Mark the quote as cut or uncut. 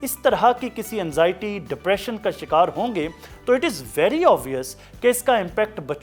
uncut